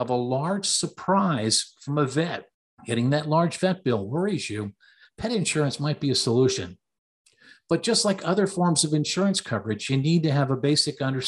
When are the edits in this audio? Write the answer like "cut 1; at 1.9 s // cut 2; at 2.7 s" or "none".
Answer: none